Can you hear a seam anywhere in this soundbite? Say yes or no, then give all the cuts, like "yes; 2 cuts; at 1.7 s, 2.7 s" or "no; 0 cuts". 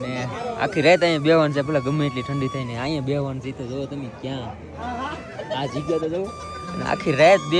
no; 0 cuts